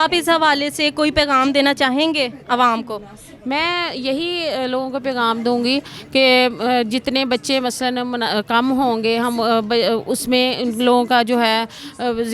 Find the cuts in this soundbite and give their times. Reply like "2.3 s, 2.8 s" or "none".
none